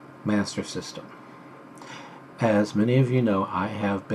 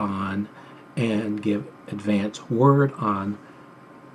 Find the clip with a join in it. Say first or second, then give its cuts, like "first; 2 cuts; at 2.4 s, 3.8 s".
first; 1 cut; at 3.0 s